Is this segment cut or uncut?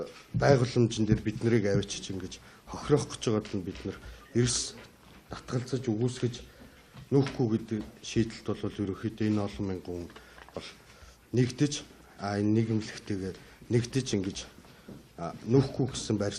cut